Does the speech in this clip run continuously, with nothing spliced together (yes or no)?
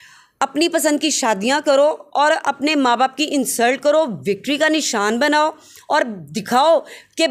yes